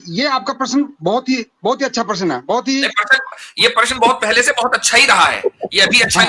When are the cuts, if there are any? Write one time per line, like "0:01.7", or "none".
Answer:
none